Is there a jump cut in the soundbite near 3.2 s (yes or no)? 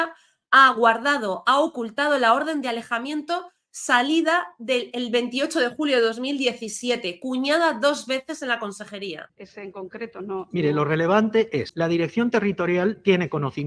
no